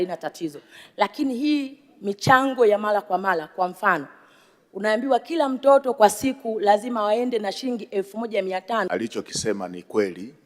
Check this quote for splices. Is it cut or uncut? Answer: cut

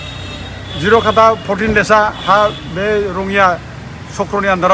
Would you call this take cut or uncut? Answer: uncut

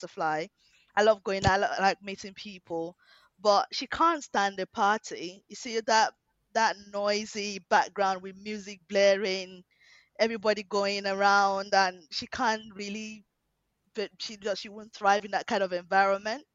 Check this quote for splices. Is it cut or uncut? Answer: uncut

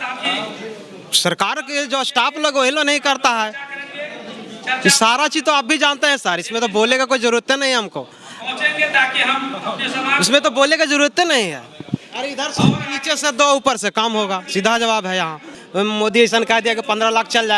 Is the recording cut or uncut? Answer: cut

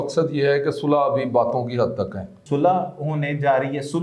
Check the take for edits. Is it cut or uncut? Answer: cut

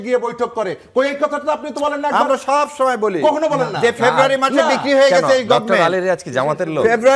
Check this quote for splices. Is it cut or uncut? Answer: uncut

